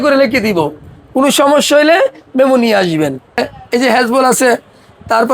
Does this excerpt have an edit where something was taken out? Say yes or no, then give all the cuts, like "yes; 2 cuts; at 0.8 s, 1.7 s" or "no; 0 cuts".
yes; 1 cut; at 3.4 s